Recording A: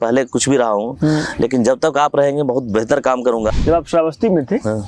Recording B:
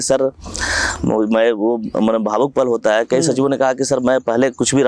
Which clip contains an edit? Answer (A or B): A